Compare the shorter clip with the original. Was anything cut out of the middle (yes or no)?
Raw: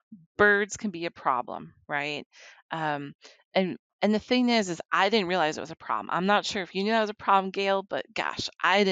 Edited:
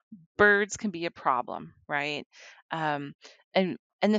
no